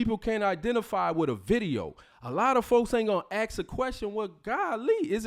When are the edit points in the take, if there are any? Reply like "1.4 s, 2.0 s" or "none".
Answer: none